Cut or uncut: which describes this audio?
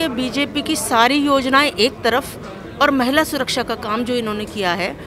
uncut